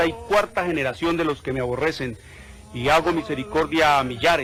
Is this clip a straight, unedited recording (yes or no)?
yes